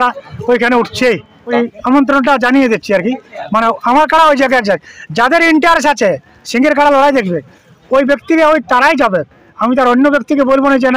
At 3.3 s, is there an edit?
no; 1 cut; at 1.4 s

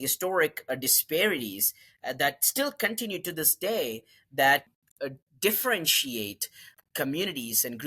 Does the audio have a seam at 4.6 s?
yes; 2 cuts; at 4.6 s, 6.7 s

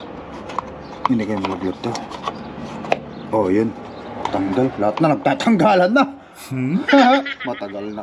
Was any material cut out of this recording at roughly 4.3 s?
yes; 1 cut; at 4.3 s

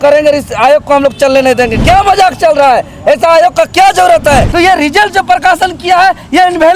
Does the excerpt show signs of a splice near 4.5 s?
yes; 1 cut; at 4.5 s

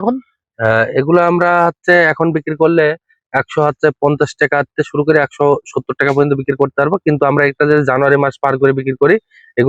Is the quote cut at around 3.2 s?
no; 0 cuts

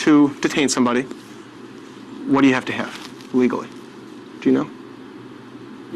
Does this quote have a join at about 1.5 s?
no; 0 cuts

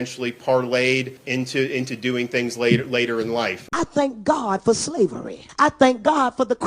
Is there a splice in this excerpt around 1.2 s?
yes; 3 cuts; at 1.2 s, 3.6 s, 5.4 s

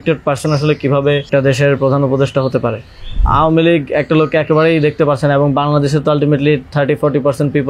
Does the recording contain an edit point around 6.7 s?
no; 2 cuts; at 1.3 s, 3.2 s

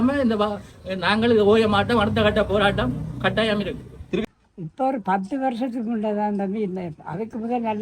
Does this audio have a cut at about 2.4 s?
no; 1 cut; at 4.2 s

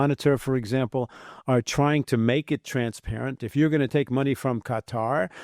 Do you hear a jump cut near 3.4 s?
yes; 1 cut; at 3.4 s

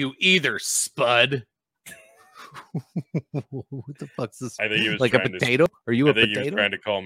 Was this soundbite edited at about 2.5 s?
no; 0 cuts

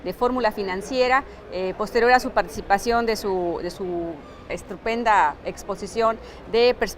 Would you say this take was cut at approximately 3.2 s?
yes; 1 cut; at 3.2 s

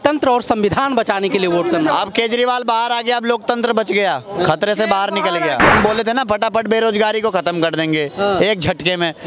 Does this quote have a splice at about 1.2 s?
no; 1 cut; at 5.7 s

